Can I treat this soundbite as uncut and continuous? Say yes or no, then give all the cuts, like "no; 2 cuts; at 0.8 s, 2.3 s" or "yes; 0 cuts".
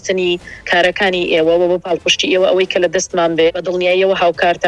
no; 1 cut; at 3.5 s